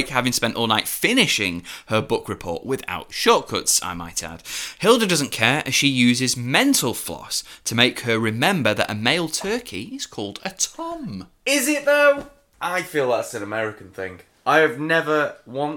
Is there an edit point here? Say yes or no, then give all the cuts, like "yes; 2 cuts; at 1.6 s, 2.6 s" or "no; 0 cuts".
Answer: no; 0 cuts